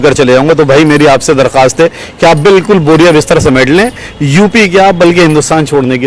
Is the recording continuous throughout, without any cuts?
yes; 0 cuts

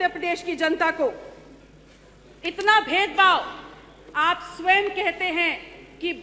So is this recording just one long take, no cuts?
yes; 0 cuts

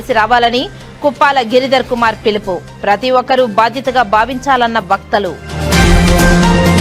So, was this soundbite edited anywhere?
no; 0 cuts

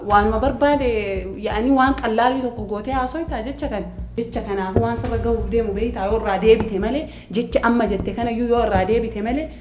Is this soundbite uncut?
no; 1 cut; at 4.1 s

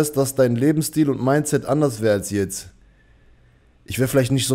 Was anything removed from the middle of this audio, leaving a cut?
no; 0 cuts

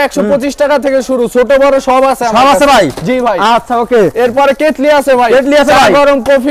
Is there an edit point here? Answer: no; 0 cuts

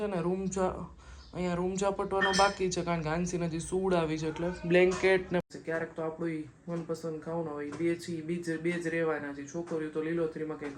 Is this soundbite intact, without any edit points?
no; 1 cut; at 5.4 s

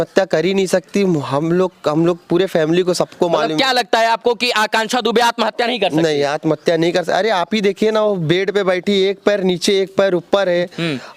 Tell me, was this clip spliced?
no; 0 cuts

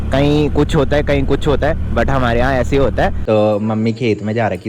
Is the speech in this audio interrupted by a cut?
yes; 1 cut; at 3.2 s

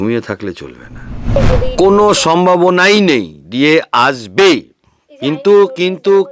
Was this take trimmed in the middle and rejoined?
yes; 1 cut; at 1.4 s

